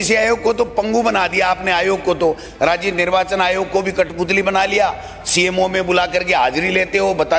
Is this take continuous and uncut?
yes; 0 cuts

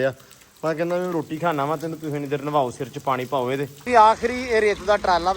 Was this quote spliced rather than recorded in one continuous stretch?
yes; 1 cut; at 3.9 s

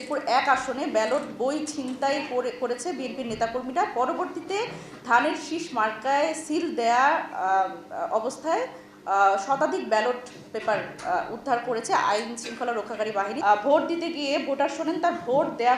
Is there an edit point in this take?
yes; 1 cut; at 13.3 s

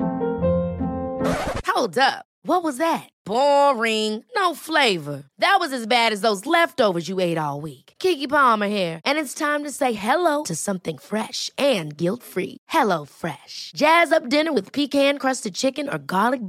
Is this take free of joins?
yes; 0 cuts

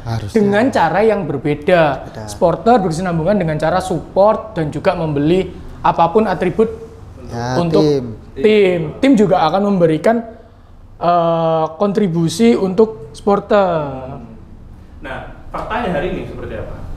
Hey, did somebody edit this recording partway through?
no; 0 cuts

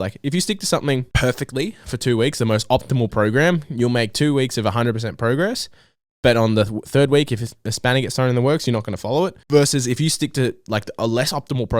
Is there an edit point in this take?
yes; 2 cuts; at 1.1 s, 9.4 s

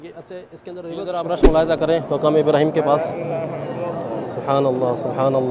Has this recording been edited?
yes; 1 cut; at 1.1 s

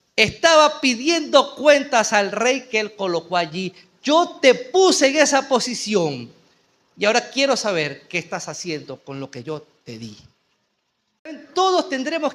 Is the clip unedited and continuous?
no; 1 cut; at 11.3 s

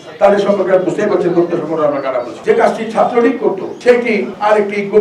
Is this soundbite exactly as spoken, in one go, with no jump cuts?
no; 1 cut; at 2.3 s

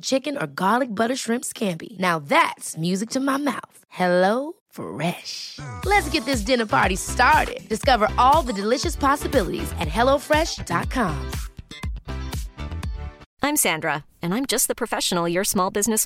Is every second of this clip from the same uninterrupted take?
no; 1 cut; at 13.3 s

